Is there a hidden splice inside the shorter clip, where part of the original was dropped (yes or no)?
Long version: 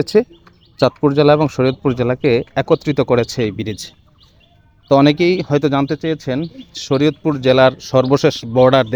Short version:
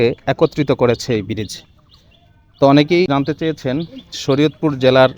yes